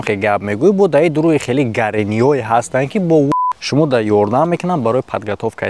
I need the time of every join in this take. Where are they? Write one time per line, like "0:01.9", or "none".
0:03.3